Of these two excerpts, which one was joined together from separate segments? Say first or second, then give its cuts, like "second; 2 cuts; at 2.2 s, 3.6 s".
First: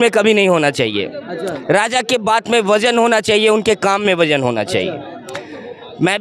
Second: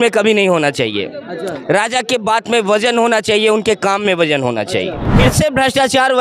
second; 1 cut; at 5.0 s